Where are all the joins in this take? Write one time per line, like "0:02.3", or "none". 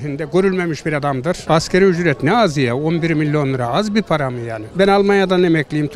0:01.4
0:04.6